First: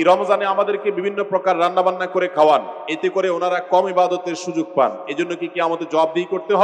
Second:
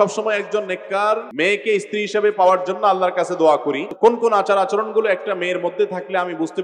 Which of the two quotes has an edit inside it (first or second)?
second